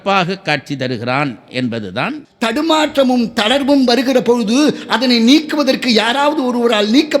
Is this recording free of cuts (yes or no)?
no